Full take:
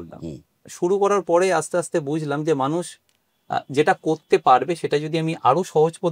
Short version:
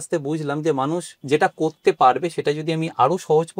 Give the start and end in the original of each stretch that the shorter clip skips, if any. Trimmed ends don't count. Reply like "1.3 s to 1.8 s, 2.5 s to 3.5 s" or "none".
3.0 s to 3.7 s